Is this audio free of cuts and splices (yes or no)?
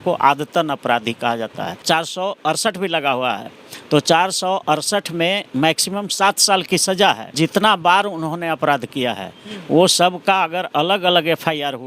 no